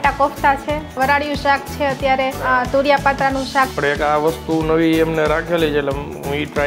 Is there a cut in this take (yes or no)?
yes